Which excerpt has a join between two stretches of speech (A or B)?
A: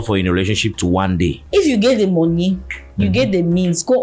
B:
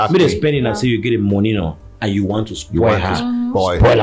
A